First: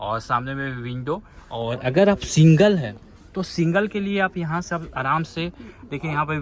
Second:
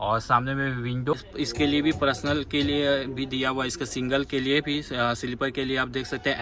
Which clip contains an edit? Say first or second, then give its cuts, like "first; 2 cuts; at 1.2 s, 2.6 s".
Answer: second; 1 cut; at 1.3 s